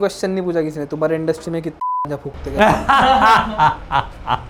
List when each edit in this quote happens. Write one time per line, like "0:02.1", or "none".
none